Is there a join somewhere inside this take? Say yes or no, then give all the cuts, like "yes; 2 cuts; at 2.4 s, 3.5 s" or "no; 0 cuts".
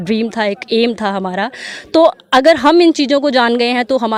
no; 0 cuts